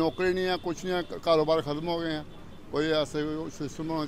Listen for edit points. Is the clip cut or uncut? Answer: uncut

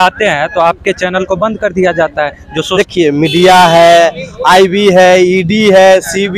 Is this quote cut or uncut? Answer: cut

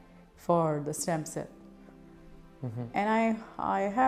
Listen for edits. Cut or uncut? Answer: uncut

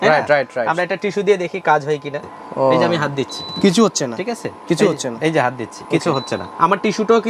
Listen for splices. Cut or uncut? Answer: cut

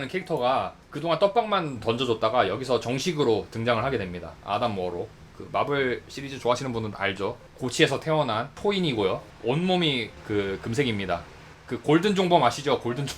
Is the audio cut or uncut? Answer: cut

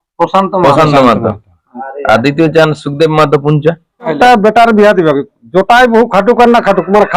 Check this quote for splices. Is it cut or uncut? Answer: cut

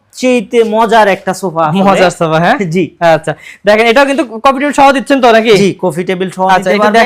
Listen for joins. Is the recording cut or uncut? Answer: uncut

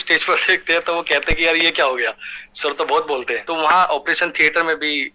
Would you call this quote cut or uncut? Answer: cut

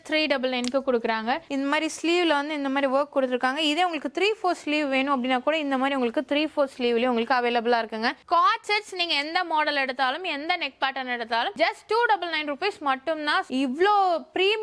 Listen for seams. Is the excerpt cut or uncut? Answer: cut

